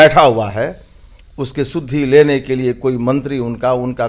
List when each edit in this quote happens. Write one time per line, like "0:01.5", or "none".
none